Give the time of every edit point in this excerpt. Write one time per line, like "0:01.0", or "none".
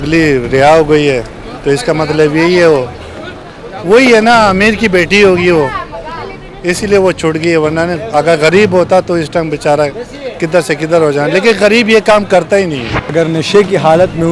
0:13.1